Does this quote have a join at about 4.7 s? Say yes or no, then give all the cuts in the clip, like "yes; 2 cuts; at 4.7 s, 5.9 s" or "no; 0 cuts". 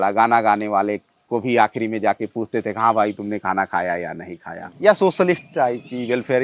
yes; 1 cut; at 4.7 s